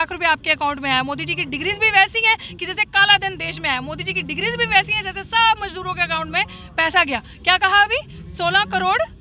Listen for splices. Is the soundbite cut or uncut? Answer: uncut